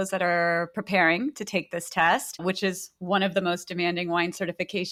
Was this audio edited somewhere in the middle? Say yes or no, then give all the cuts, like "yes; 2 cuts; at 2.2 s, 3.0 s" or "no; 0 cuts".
no; 0 cuts